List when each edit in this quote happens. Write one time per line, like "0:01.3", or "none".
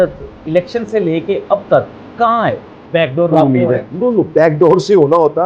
0:02.8